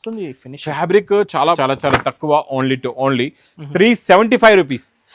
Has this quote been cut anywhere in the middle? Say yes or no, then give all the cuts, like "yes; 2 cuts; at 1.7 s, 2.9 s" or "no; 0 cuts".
yes; 1 cut; at 1.6 s